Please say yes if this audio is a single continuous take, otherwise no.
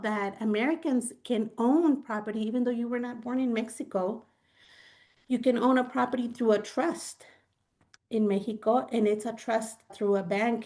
yes